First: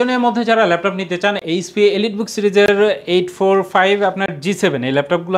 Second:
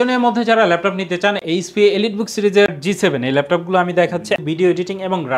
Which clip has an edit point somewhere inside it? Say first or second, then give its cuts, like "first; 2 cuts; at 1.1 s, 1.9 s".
second; 2 cuts; at 2.7 s, 4.4 s